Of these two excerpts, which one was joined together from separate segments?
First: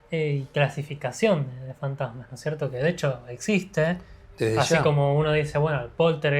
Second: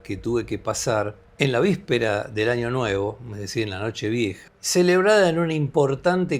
second; 2 cuts; at 1.2 s, 4.5 s

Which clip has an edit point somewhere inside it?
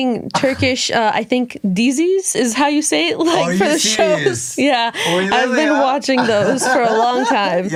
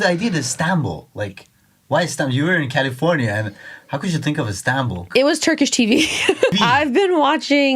second; 2 cuts; at 5.1 s, 6.5 s

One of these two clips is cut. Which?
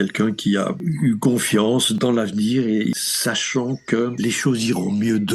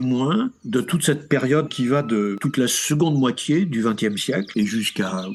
first; 3 cuts; at 2.0 s, 2.9 s, 4.1 s

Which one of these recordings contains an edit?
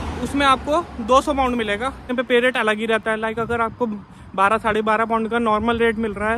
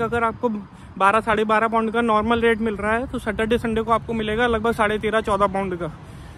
first; 1 cut; at 2.1 s

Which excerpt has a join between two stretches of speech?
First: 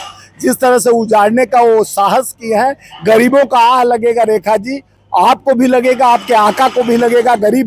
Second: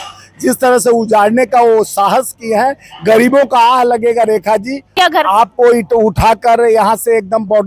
second; 1 cut; at 4.9 s

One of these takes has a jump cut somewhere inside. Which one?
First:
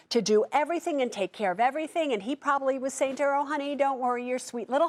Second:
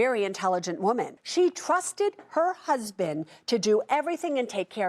second; 1 cut; at 1.2 s

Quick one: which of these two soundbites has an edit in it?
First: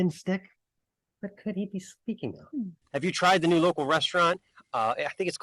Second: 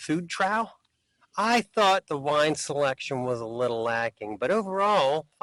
first; 1 cut; at 2.8 s

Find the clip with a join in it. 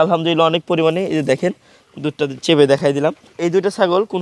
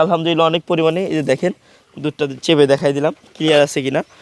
first; 1 cut; at 3.3 s

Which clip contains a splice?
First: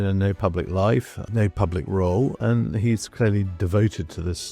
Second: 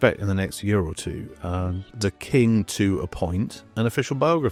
first; 2 cuts; at 1.2 s, 2.4 s

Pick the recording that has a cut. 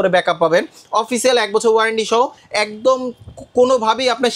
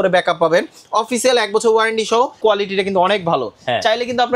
second; 1 cut; at 2.4 s

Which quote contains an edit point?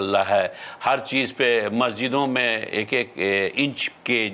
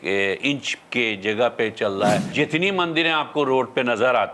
second; 1 cut; at 2.3 s

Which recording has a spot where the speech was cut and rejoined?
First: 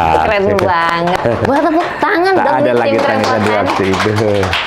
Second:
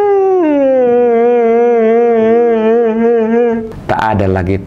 second; 1 cut; at 3.7 s

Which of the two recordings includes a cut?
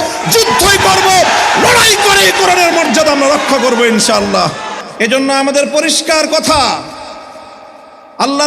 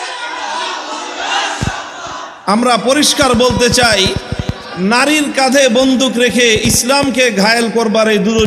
first; 1 cut; at 5.1 s

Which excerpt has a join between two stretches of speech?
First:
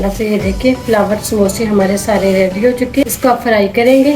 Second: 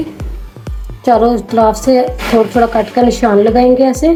first; 1 cut; at 3.0 s

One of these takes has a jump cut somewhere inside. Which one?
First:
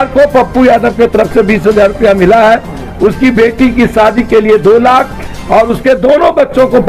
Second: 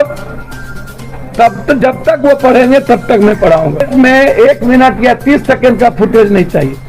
second; 1 cut; at 3.9 s

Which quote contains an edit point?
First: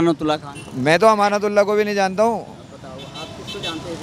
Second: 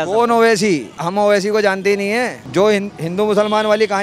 second; 1 cut; at 2.4 s

